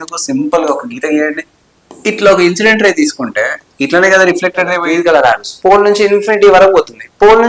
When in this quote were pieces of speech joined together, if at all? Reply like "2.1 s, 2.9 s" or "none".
4.8 s

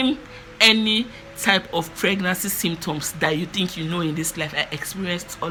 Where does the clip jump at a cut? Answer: none

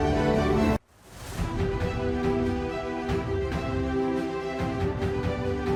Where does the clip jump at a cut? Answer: none

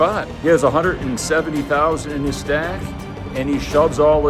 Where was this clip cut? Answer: none

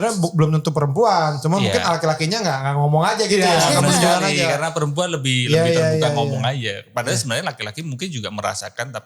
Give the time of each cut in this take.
none

